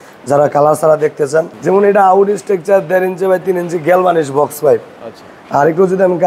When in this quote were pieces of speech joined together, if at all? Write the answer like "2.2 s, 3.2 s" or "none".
1.5 s